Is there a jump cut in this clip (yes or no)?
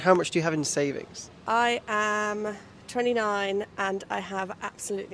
no